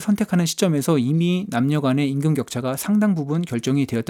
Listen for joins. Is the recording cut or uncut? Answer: uncut